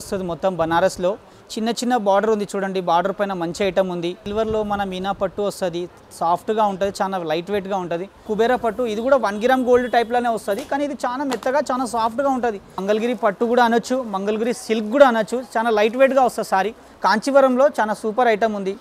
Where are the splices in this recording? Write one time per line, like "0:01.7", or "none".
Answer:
0:04.2
0:08.3
0:12.8
0:16.8